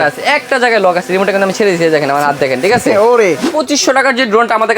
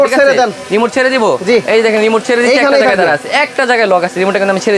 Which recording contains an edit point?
first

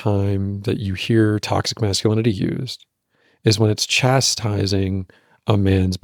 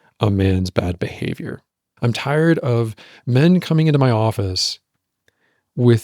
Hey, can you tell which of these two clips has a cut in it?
second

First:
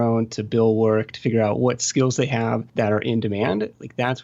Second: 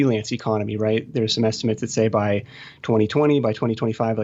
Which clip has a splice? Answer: first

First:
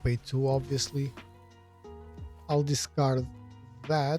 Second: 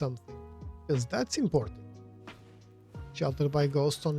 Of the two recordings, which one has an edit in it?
second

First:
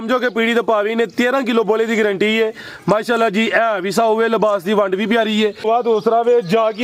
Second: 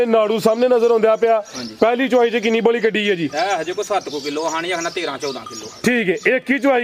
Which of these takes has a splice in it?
first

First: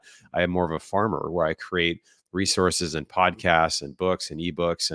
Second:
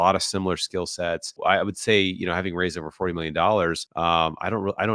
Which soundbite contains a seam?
second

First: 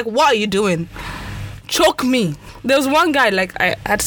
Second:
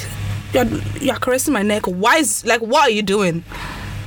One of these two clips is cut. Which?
first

